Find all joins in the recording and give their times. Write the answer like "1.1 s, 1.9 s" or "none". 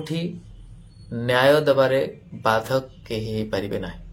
none